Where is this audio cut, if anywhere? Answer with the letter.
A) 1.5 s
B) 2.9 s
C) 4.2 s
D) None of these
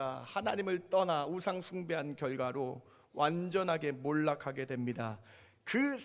D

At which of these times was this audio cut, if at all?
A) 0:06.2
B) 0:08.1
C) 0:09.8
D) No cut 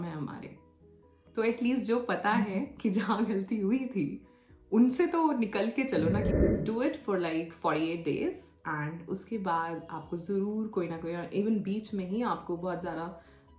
A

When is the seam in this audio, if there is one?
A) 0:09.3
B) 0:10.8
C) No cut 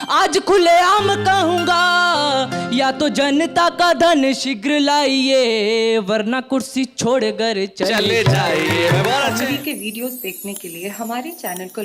A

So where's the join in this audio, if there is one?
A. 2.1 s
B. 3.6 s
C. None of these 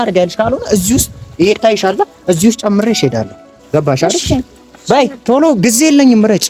C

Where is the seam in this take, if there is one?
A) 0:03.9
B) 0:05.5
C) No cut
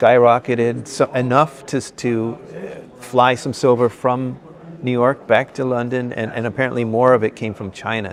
C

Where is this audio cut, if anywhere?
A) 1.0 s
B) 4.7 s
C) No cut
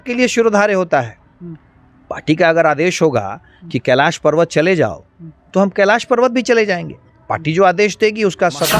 C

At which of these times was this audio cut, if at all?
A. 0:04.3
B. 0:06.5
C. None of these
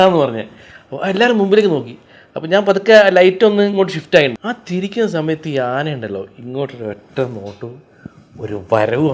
A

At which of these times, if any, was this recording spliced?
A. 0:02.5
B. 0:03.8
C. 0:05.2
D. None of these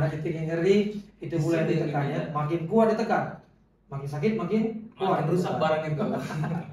D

